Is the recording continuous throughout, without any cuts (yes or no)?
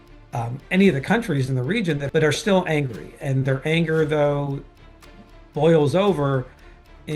no